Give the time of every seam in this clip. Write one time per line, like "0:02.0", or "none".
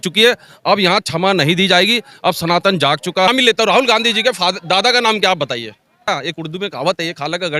0:03.3
0:06.1